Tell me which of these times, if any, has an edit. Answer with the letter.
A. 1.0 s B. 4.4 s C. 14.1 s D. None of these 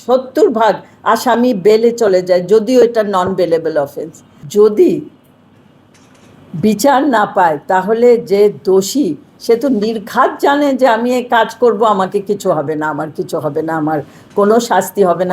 B